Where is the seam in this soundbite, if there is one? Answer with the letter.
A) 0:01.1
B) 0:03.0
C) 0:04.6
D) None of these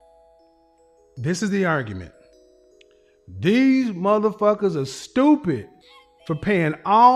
A